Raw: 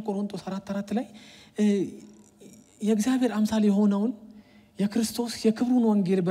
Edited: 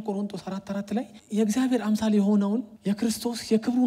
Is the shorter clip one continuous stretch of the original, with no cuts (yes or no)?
no